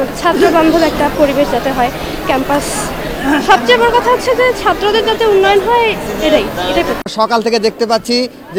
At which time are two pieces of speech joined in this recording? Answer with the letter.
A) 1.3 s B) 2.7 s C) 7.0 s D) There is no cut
C